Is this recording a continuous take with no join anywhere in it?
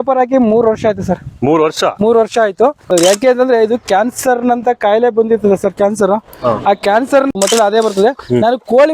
no; 2 cuts; at 2.9 s, 7.3 s

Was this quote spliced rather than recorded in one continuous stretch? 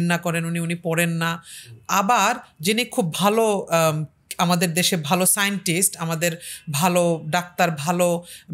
no; 0 cuts

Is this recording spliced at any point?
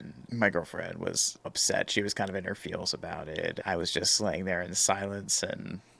yes; 2 cuts; at 1.5 s, 3.6 s

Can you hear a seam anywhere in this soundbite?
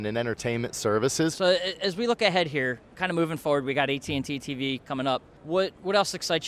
yes; 3 cuts; at 1.3 s, 2.9 s, 5.3 s

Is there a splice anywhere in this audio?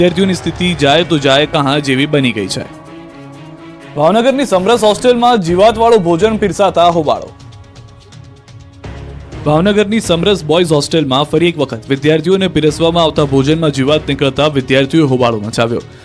yes; 1 cut; at 12.8 s

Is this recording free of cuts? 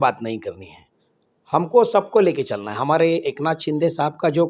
yes; 0 cuts

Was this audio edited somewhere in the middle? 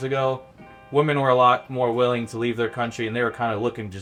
no; 0 cuts

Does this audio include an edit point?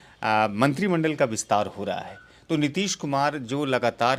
no; 0 cuts

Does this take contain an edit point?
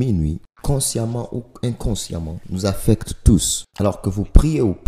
yes; 1 cut; at 3.6 s

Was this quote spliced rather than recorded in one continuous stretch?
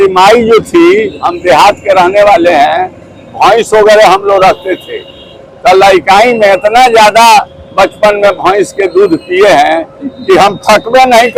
no; 0 cuts

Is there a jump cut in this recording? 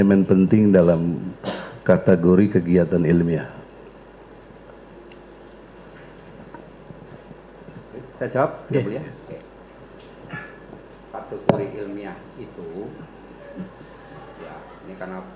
no; 0 cuts

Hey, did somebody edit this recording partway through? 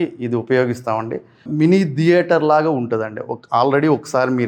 no; 0 cuts

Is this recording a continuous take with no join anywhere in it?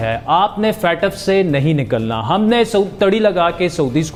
yes; 0 cuts

